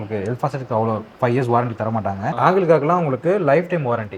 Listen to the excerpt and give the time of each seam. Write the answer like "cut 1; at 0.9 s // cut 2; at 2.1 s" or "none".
cut 1; at 2.3 s